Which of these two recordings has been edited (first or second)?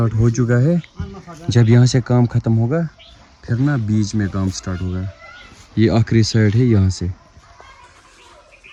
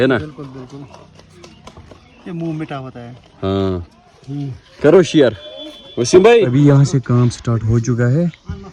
second